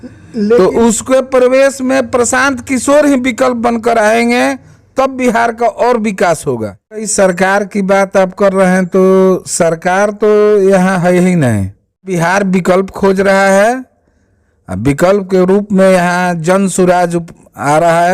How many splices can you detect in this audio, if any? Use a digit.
2